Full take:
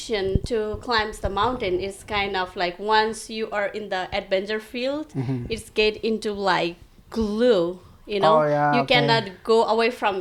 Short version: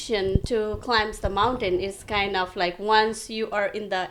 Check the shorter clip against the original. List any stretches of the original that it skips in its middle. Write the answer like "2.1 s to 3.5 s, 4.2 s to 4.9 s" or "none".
none